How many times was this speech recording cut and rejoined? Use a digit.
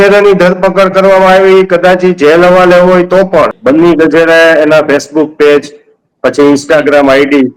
1